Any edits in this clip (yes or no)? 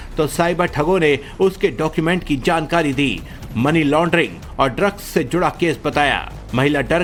no